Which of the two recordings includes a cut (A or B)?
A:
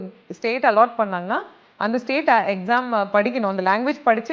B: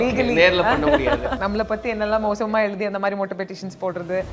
B